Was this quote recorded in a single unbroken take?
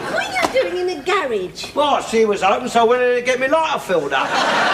yes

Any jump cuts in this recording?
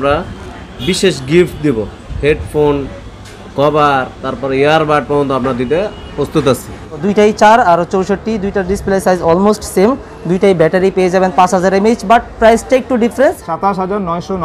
yes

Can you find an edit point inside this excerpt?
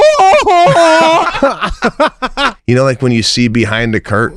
yes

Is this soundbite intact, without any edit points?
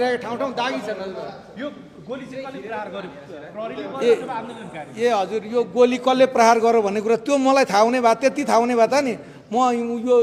yes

